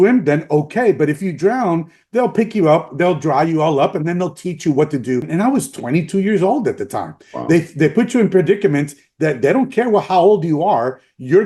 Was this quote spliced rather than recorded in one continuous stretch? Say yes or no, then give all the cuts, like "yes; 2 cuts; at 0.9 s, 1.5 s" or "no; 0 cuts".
yes; 1 cut; at 5.3 s